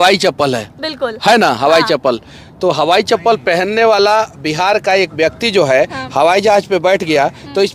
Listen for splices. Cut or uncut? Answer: uncut